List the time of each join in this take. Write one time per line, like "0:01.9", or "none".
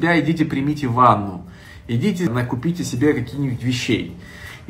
0:02.3